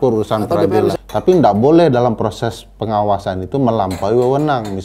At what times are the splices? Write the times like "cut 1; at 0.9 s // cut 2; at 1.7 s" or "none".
cut 1; at 0.9 s

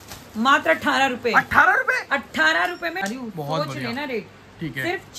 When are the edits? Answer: cut 1; at 3.0 s

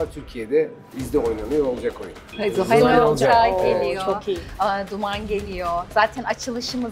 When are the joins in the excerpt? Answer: cut 1; at 1.0 s // cut 2; at 2.3 s

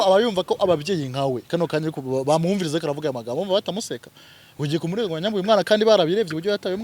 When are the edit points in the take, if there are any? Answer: none

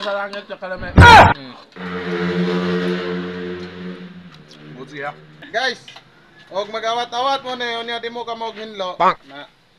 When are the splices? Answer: none

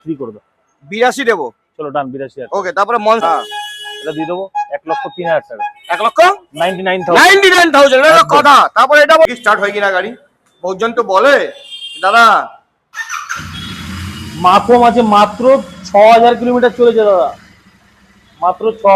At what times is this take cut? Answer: cut 1; at 3.2 s // cut 2; at 9.3 s

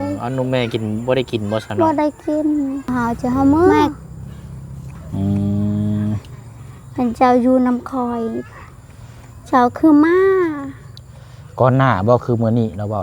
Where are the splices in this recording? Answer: cut 1; at 2.9 s

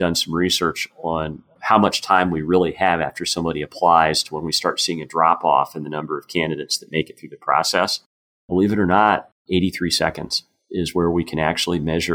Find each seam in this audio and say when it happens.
cut 1; at 9.3 s

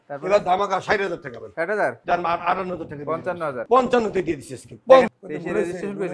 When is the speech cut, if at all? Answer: cut 1; at 2.0 s // cut 2; at 3.6 s // cut 3; at 5.1 s

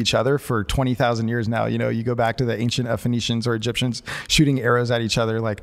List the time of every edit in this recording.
none

